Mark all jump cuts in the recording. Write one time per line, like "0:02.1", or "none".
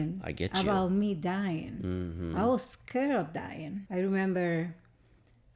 0:03.7